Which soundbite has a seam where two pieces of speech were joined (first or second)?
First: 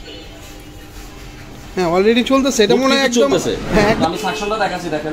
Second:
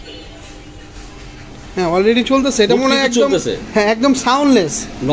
first